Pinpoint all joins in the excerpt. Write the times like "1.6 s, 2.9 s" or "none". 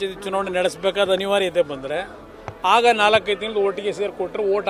none